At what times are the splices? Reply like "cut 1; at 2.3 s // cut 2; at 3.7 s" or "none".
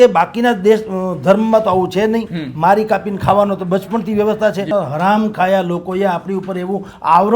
cut 1; at 4.7 s